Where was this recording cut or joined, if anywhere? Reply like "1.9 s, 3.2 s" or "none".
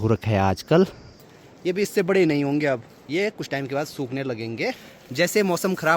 1.2 s, 4.8 s